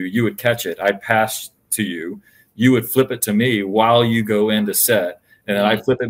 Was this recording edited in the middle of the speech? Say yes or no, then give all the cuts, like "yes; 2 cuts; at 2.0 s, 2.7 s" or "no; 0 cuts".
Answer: no; 0 cuts